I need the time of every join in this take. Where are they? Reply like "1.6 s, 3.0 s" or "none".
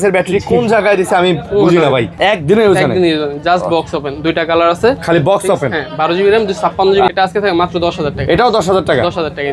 2.1 s, 7.1 s